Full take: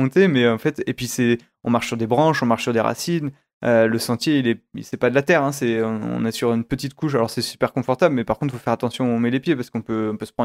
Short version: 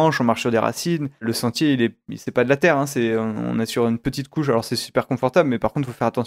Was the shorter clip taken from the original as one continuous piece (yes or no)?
no